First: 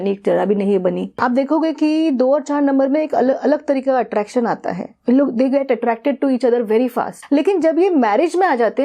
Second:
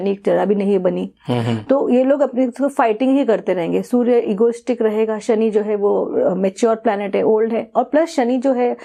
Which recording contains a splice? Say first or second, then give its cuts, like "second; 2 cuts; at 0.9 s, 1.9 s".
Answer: first; 2 cuts; at 1.2 s, 7.1 s